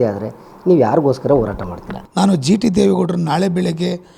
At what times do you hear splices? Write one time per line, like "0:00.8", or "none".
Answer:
0:01.9